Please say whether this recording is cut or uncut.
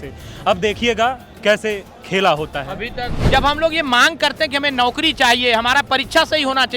cut